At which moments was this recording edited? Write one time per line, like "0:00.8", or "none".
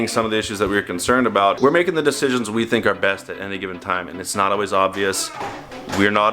0:01.6